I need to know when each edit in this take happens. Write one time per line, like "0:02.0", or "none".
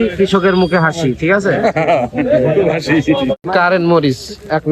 0:03.3